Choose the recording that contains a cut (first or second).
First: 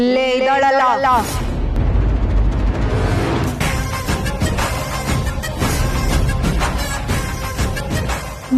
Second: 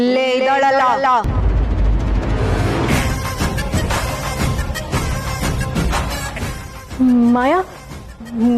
second